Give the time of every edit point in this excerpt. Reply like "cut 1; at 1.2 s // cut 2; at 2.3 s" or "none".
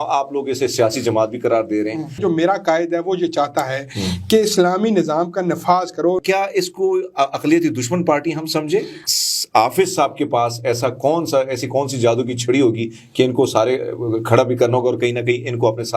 cut 1; at 2.2 s // cut 2; at 6.2 s // cut 3; at 9.0 s